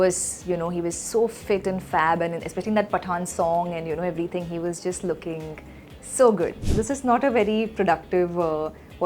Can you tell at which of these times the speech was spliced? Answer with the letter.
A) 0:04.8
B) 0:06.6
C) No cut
B